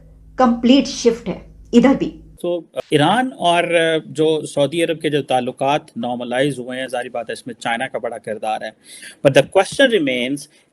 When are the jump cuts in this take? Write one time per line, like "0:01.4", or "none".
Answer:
none